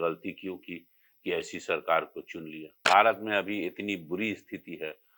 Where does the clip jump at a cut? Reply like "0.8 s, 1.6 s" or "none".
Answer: 2.7 s